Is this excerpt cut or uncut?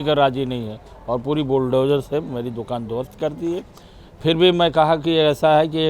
uncut